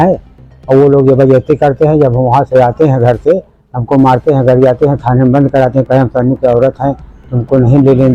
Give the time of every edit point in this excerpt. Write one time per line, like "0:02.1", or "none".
none